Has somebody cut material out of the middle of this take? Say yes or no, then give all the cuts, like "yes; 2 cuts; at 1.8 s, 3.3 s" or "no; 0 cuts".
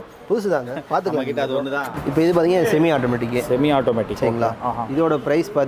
yes; 1 cut; at 2.0 s